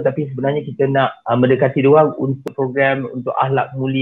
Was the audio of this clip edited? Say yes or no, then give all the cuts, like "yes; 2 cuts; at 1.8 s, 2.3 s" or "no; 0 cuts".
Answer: yes; 2 cuts; at 1.2 s, 2.4 s